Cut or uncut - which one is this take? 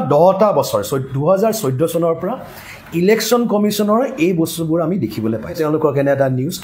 cut